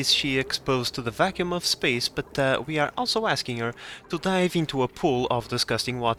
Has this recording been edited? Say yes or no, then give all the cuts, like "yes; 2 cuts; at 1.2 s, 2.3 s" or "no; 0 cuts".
no; 0 cuts